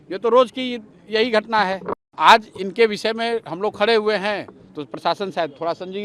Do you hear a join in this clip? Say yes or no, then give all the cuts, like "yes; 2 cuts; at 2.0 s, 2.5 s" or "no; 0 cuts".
yes; 1 cut; at 2.0 s